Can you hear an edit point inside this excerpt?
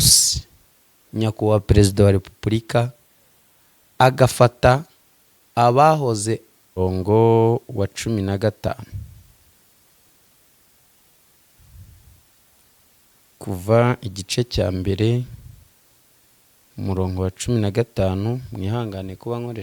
yes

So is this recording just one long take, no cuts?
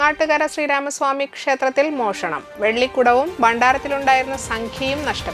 yes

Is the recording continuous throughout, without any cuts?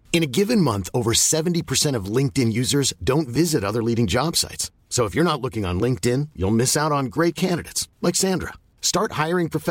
yes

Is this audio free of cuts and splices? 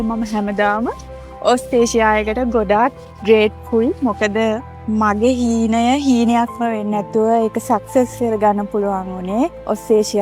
yes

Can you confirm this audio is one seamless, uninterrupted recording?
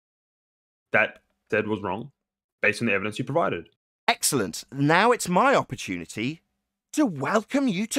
yes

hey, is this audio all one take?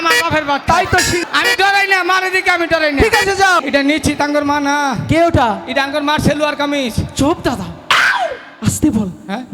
no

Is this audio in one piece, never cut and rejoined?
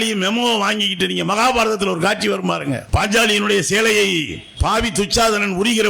no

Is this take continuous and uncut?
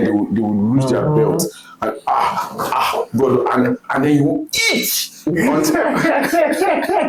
yes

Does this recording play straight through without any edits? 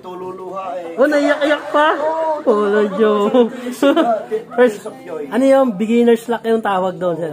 yes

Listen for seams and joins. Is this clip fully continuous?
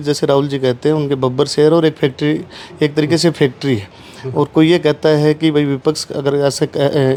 yes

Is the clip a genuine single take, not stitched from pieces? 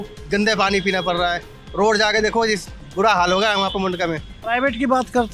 no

